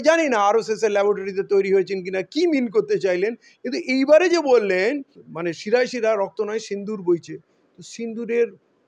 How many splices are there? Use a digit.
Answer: 1